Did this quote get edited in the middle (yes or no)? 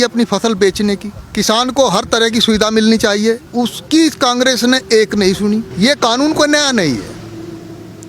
yes